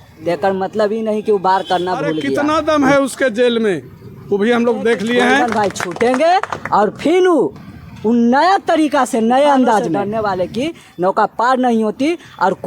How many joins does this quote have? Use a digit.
3